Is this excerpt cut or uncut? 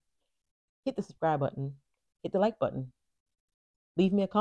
uncut